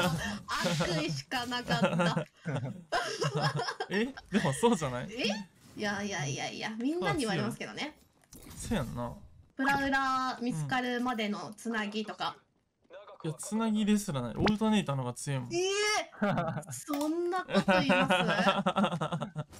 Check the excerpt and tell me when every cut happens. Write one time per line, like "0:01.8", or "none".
none